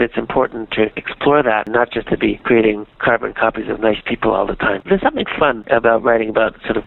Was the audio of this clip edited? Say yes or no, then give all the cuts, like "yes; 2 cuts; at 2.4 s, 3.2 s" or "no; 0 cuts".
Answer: yes; 3 cuts; at 1.7 s, 3.0 s, 4.9 s